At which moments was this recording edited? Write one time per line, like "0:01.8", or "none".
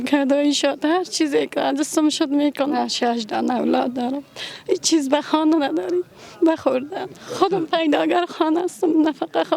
0:02.7
0:07.2